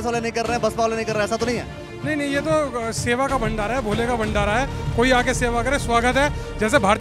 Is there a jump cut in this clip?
no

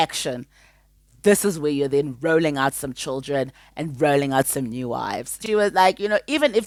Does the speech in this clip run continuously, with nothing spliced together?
yes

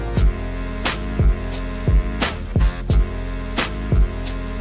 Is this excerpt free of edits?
no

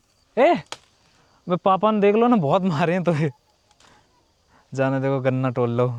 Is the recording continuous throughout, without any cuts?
yes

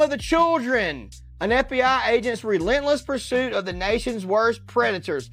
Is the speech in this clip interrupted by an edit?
no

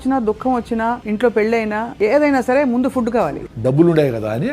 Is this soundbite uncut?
no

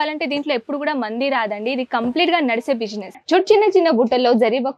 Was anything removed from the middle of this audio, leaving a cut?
yes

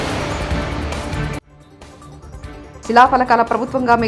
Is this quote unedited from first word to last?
yes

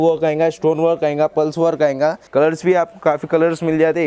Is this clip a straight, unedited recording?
no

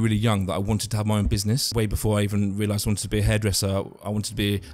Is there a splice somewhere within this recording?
yes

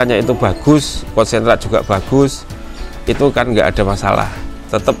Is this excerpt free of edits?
yes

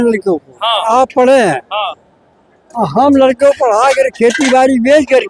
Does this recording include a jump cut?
no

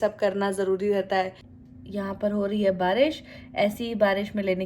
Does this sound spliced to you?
yes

